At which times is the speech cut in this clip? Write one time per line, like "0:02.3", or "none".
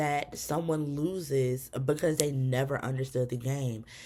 none

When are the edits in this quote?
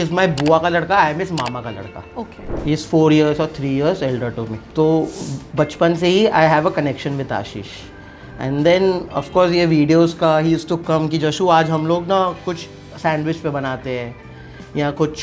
0:02.4
0:04.6

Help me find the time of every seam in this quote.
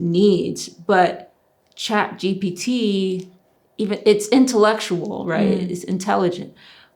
none

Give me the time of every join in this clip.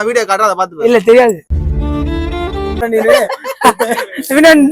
0:02.8

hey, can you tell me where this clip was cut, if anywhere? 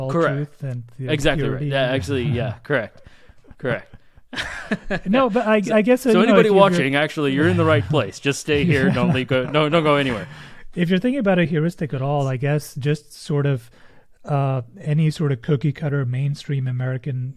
none

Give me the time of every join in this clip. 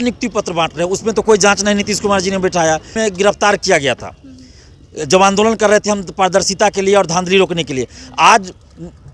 0:03.0

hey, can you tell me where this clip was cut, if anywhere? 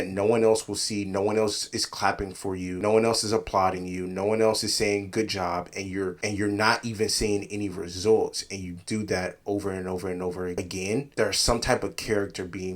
none

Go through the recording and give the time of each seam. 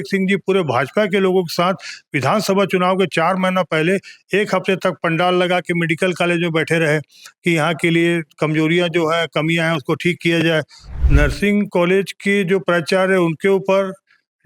0:10.9

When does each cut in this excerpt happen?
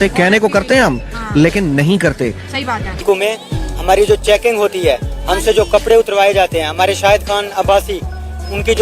0:02.9

